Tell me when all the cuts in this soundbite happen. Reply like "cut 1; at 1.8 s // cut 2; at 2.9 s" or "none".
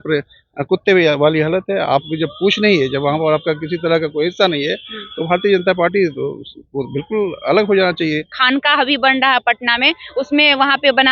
cut 1; at 8.4 s

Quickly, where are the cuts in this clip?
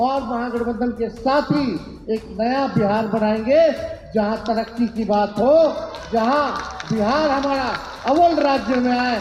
none

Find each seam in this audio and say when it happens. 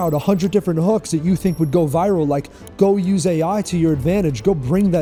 none

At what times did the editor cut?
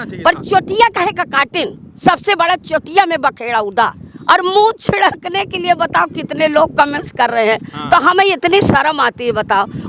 cut 1; at 4.1 s

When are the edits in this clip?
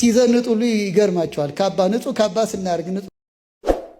cut 1; at 3.1 s

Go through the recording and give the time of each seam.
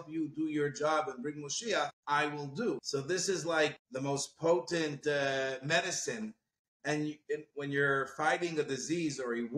cut 1; at 2.0 s // cut 2; at 2.8 s // cut 3; at 3.8 s

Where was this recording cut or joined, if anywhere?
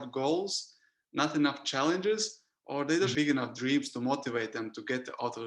cut 1; at 3.1 s

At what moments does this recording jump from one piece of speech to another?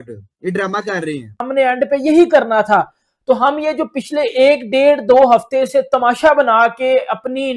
cut 1; at 1.4 s

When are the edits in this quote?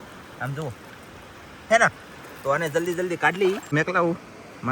cut 1; at 3.6 s

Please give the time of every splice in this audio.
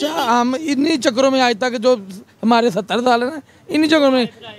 none

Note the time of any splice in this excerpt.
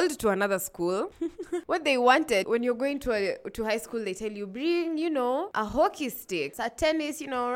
cut 1; at 2.5 s // cut 2; at 5.5 s // cut 3; at 6.5 s

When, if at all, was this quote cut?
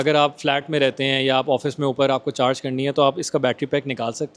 none

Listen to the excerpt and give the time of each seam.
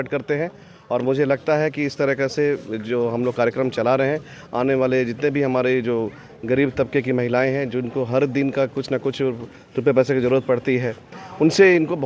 none

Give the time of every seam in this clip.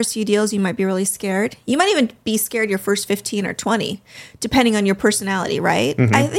none

